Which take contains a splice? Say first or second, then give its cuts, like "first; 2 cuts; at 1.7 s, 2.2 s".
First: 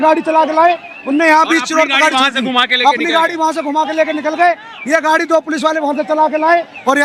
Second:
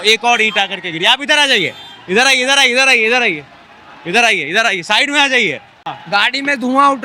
second; 1 cut; at 5.9 s